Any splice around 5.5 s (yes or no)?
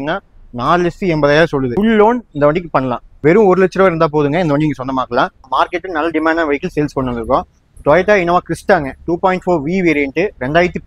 yes